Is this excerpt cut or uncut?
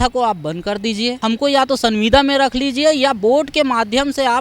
cut